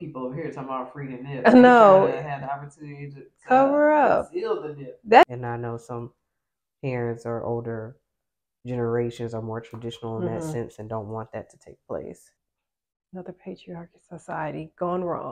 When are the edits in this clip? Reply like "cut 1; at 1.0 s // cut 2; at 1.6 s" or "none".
cut 1; at 5.2 s // cut 2; at 12.3 s